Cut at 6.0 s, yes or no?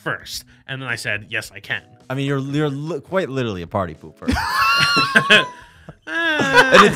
no